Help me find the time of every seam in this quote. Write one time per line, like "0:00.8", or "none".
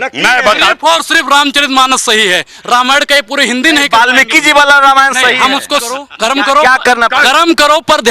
0:06.1